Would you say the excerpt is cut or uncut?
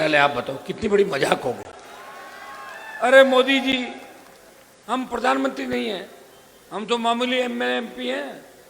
uncut